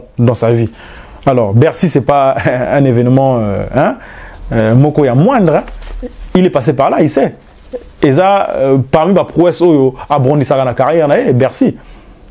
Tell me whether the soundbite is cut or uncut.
uncut